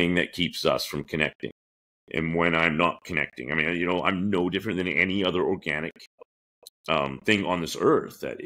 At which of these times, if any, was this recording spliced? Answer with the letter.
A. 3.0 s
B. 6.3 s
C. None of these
B